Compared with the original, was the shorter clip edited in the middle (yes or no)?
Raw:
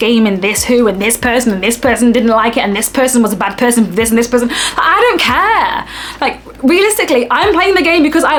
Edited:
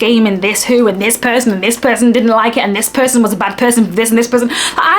no